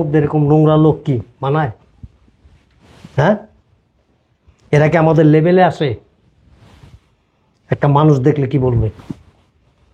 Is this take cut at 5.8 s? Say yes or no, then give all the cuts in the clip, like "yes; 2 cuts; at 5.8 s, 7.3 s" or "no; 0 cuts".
no; 0 cuts